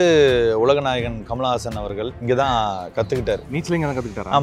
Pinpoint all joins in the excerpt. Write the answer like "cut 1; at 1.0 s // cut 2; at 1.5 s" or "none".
cut 1; at 2.2 s // cut 2; at 3.5 s